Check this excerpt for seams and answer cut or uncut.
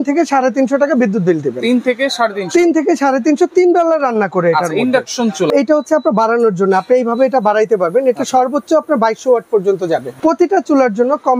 cut